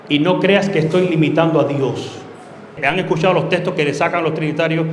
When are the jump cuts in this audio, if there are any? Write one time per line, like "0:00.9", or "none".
0:02.8